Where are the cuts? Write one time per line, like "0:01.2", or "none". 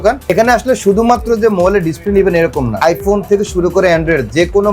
0:02.7